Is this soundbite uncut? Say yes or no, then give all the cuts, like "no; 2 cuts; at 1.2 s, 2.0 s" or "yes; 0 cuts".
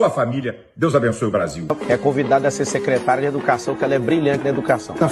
yes; 0 cuts